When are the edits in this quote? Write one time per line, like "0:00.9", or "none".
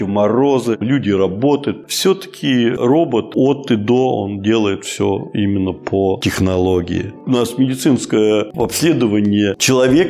0:01.8
0:07.2